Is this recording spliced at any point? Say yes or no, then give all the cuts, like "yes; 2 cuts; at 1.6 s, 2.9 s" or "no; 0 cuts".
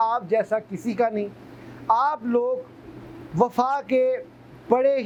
no; 0 cuts